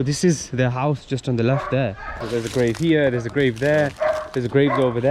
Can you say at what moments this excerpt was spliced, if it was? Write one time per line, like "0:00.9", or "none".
0:02.2